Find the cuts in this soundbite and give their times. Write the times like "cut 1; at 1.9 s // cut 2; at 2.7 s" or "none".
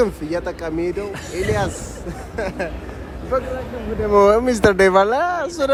none